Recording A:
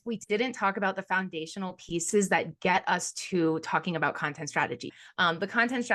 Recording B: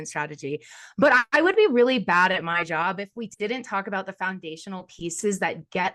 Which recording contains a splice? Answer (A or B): A